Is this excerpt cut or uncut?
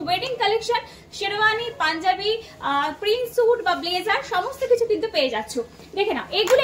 uncut